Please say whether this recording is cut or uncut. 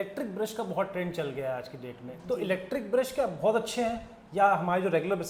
uncut